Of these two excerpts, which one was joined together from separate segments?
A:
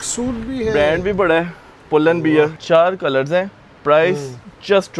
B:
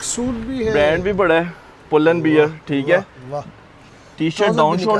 A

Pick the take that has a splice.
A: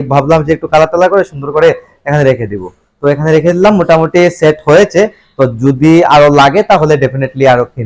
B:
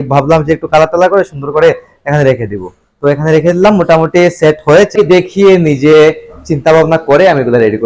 B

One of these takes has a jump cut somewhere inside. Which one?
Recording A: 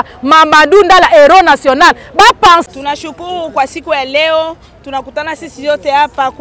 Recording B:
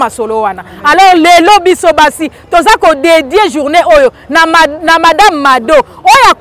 A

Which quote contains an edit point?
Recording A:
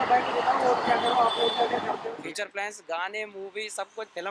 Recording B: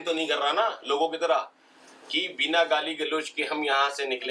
A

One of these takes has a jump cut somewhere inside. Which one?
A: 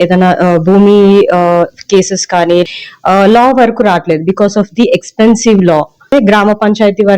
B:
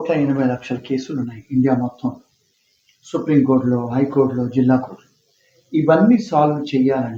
A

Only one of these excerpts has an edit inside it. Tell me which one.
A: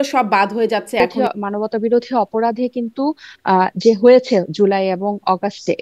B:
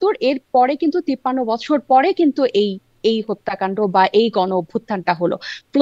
A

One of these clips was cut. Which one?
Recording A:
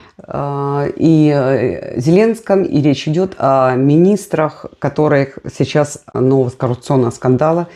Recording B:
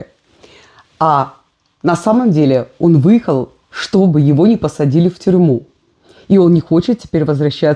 A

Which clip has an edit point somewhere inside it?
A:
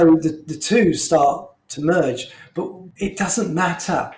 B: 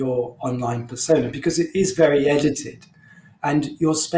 A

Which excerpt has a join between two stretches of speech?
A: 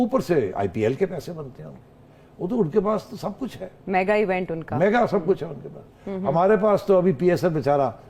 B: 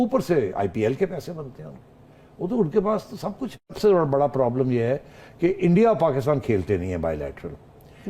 B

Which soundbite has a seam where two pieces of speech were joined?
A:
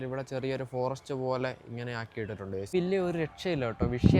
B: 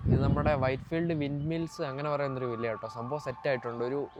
A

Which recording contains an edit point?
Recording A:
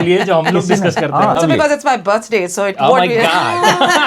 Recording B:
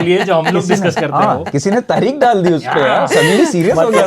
A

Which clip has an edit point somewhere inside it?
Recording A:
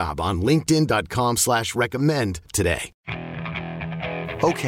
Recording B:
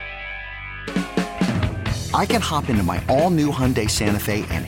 A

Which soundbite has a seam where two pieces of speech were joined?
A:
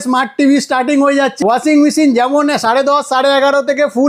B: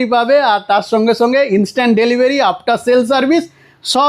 A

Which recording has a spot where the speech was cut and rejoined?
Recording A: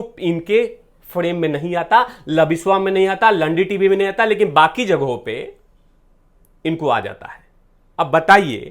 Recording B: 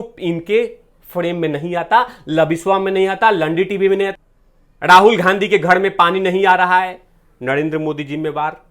B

